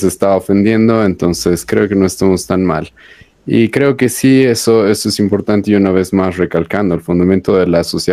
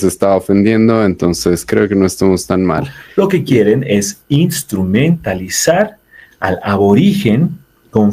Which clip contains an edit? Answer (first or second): second